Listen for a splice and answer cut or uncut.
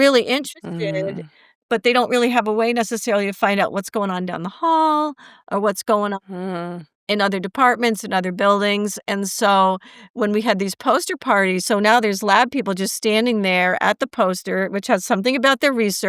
uncut